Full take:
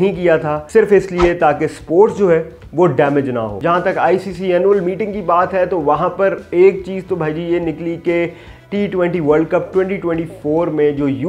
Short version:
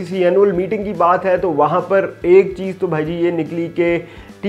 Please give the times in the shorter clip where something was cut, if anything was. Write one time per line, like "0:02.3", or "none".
none